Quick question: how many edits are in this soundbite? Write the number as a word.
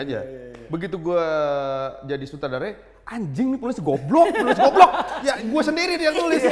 one